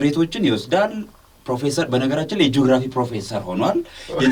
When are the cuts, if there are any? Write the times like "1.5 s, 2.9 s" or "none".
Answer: none